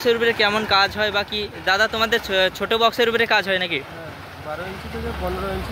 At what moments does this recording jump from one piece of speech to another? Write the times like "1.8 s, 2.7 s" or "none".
none